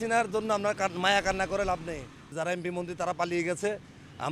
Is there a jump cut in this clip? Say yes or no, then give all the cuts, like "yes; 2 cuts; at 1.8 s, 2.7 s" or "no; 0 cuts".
yes; 1 cut; at 2.3 s